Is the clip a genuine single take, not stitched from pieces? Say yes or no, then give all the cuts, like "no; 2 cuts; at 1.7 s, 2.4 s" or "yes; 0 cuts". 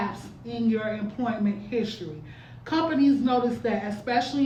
yes; 0 cuts